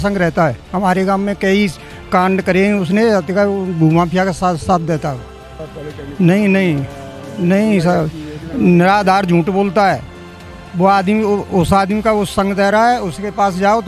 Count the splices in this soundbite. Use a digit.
0